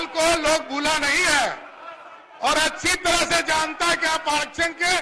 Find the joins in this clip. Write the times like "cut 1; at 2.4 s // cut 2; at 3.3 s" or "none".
none